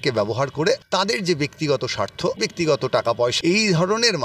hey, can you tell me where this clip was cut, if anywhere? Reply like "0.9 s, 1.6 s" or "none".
0.8 s, 2.4 s, 3.4 s